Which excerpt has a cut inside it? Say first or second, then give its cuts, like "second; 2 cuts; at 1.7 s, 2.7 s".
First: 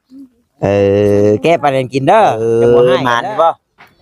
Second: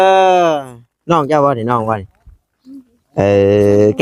first; 1 cut; at 2.4 s